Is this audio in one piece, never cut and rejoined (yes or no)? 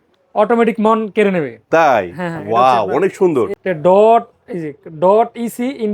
no